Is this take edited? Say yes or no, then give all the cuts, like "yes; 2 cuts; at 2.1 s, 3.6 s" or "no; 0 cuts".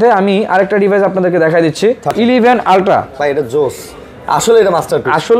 yes; 1 cut; at 2.1 s